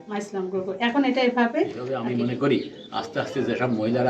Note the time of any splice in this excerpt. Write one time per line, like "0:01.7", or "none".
0:01.9